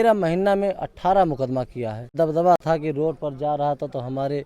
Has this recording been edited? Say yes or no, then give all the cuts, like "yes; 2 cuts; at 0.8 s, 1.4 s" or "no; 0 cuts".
yes; 1 cut; at 2.1 s